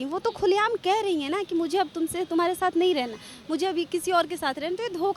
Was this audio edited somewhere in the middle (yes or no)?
no